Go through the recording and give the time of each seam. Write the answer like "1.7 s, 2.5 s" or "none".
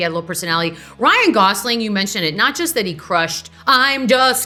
none